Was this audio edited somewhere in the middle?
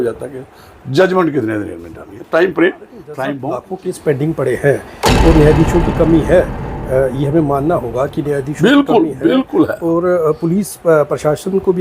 yes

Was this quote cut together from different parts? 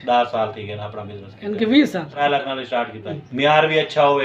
yes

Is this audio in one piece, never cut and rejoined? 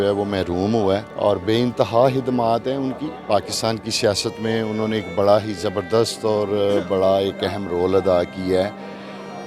yes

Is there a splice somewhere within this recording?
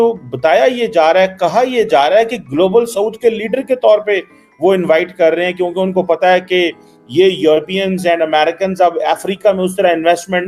no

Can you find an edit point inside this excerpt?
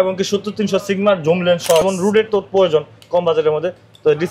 yes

